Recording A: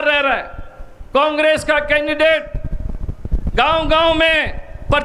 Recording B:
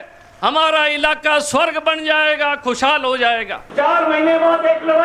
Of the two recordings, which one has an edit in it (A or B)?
B